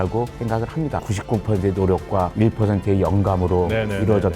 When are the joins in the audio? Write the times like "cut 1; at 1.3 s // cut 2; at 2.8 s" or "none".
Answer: cut 1; at 1.0 s